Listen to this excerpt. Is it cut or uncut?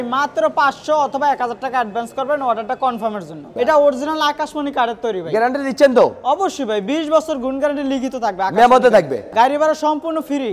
cut